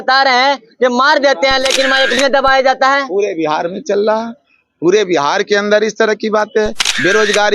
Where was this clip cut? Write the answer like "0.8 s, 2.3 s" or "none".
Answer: 2.2 s